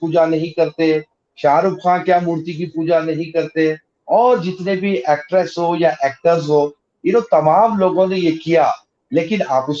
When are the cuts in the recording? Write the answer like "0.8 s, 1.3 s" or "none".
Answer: none